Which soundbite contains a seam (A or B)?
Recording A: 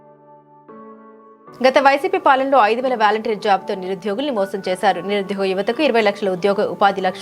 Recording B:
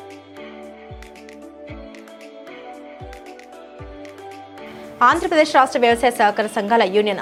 A